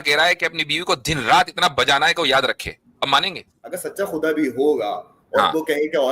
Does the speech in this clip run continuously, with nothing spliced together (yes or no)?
no